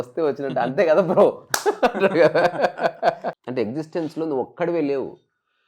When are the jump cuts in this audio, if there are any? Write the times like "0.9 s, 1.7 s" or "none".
3.4 s